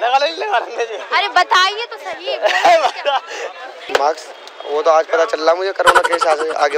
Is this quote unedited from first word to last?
no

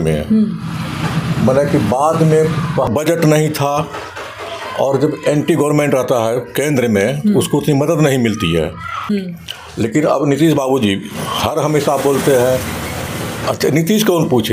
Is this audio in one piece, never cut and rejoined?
no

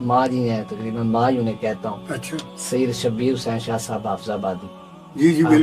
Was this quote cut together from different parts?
no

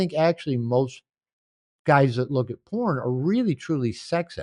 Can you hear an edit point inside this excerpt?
no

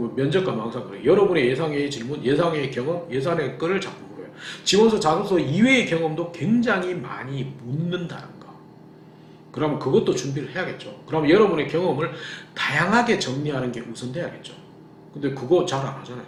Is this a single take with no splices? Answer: yes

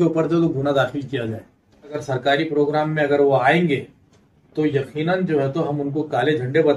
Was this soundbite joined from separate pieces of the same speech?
yes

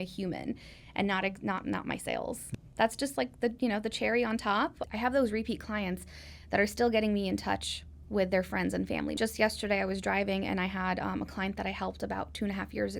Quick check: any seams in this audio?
yes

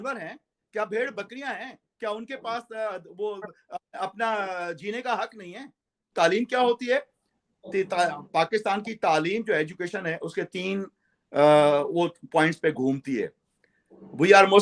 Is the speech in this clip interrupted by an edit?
yes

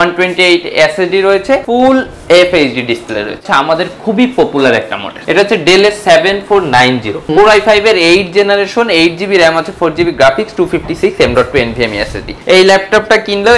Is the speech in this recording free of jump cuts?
no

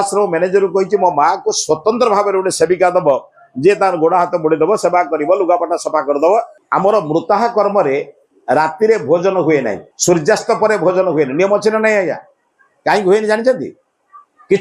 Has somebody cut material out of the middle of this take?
yes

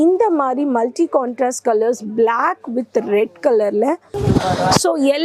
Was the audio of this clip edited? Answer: yes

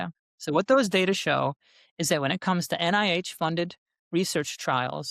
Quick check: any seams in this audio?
no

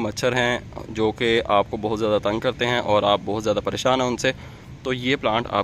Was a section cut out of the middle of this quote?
no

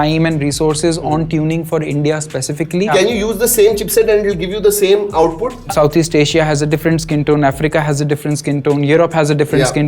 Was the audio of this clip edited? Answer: yes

